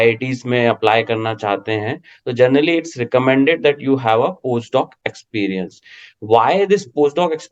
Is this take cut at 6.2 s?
no; 0 cuts

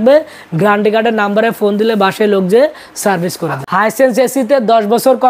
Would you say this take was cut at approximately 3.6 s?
yes; 1 cut; at 3.6 s

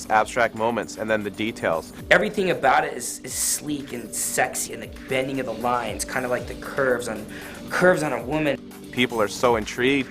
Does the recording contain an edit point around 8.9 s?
yes; 3 cuts; at 2.0 s, 4.6 s, 8.9 s

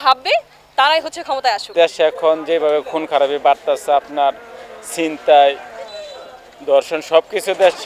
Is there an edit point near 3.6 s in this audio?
no; 1 cut; at 1.7 s

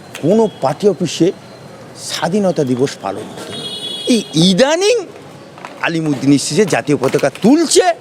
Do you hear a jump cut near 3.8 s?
no; 0 cuts

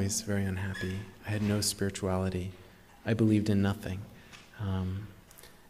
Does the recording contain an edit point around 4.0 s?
no; 0 cuts

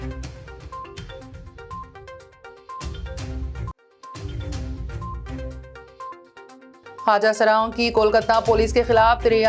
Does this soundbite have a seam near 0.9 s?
yes; 1 cut; at 0.9 s

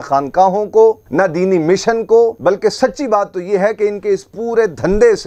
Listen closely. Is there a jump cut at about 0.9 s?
no; 0 cuts

